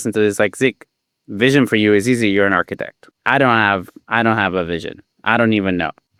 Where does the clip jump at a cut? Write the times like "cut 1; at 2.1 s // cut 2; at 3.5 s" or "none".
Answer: none